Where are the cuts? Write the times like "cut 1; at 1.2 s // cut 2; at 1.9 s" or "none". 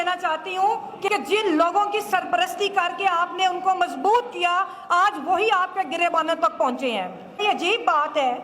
cut 1; at 1.0 s // cut 2; at 7.4 s